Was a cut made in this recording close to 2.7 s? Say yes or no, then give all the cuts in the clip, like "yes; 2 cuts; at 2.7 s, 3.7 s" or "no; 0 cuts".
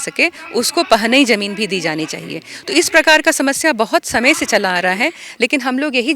no; 0 cuts